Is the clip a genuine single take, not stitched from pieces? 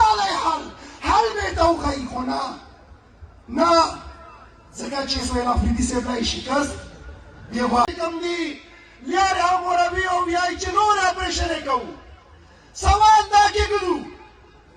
no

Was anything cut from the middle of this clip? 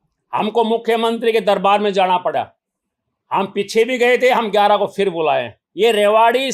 yes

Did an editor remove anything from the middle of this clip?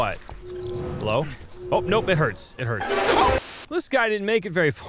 yes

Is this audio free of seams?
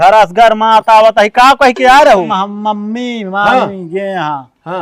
no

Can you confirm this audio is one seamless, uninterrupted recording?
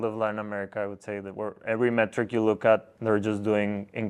no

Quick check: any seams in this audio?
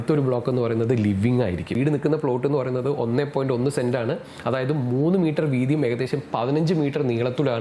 yes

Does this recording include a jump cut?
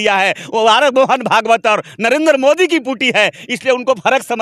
no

